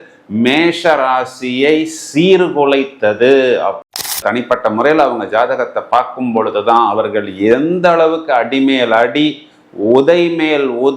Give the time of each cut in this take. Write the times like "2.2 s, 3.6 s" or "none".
4.2 s